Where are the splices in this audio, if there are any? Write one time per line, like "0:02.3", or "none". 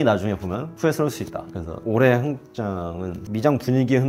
0:01.5
0:03.1

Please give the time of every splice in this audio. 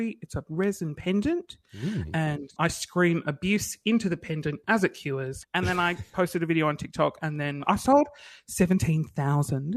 0:02.5
0:05.3
0:07.6

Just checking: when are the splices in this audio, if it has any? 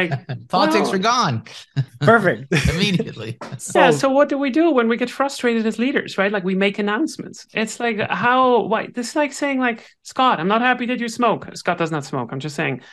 none

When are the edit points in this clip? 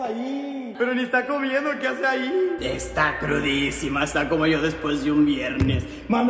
0:02.6

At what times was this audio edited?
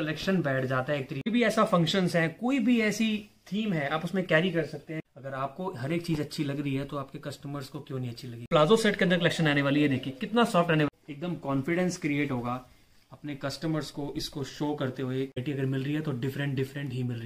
0:01.3
0:05.0
0:08.5
0:10.9
0:15.4

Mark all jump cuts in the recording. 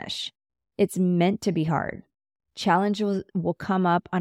0:03.3

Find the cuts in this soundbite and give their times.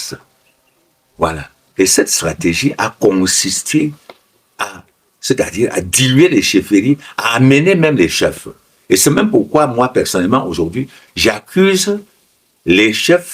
0:01.5

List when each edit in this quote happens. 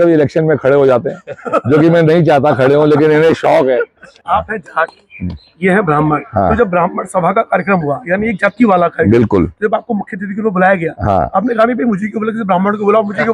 0:04.2

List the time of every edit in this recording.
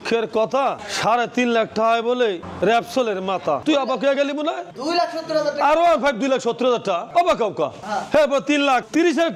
0:03.6
0:07.8

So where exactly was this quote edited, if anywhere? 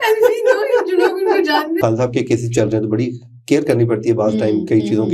0:01.8

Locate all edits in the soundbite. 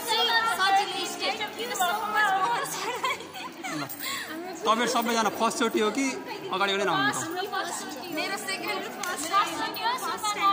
none

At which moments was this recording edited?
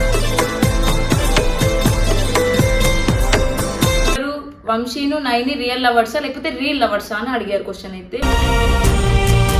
0:04.2
0:08.2

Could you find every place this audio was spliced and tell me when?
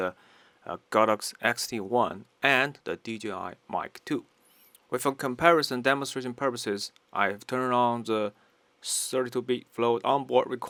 none

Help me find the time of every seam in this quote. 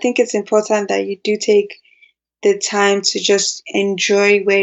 none

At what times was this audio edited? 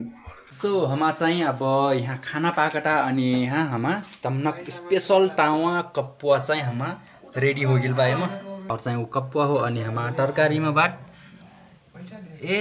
0:08.6

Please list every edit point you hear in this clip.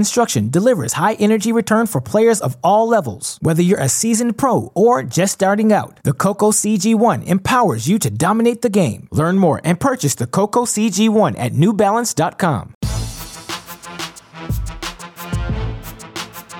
0:12.8

